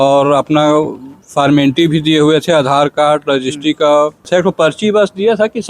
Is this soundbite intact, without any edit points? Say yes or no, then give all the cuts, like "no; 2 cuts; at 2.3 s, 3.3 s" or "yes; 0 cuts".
no; 1 cut; at 4.3 s